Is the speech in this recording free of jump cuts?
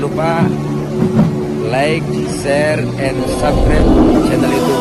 yes; 0 cuts

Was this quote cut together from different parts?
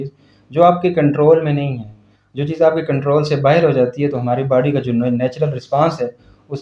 no; 0 cuts

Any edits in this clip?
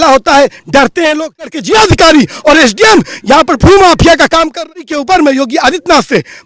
yes; 2 cuts; at 1.5 s, 4.7 s

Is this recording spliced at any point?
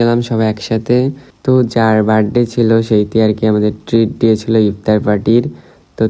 no; 0 cuts

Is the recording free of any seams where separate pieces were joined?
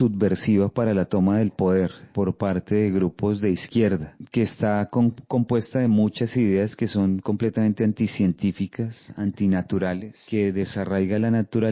no; 3 cuts; at 2.0 s, 4.2 s, 10.1 s

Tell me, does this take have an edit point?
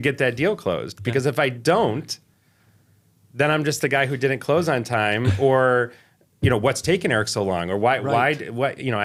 no; 0 cuts

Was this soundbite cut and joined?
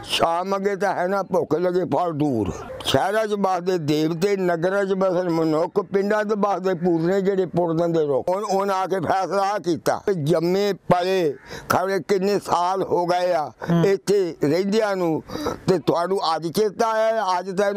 yes; 3 cuts; at 2.7 s, 8.2 s, 10.0 s

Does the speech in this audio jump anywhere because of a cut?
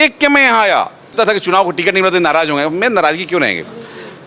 yes; 1 cut; at 1.1 s

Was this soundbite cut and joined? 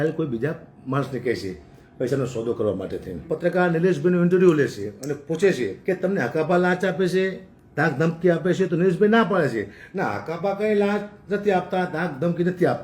yes; 2 cuts; at 3.1 s, 5.8 s

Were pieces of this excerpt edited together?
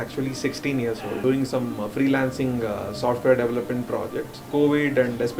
yes; 2 cuts; at 1.2 s, 4.4 s

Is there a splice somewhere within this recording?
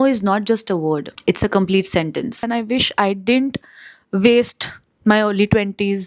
yes; 1 cut; at 2.4 s

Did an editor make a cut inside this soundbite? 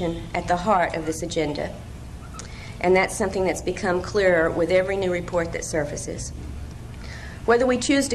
no; 0 cuts

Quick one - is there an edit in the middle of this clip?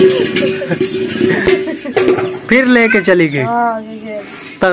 yes; 1 cut; at 1.5 s

